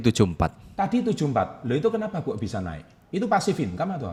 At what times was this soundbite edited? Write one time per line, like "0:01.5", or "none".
none